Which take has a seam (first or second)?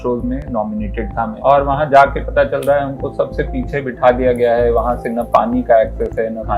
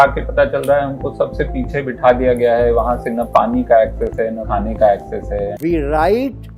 second